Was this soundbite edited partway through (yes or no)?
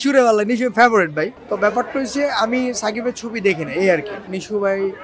yes